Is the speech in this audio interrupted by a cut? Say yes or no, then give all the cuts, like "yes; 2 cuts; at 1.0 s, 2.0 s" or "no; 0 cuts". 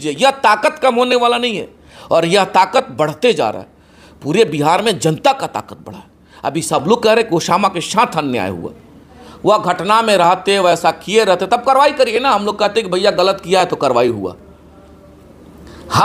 no; 0 cuts